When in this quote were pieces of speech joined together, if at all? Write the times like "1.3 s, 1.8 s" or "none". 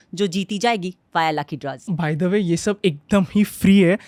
none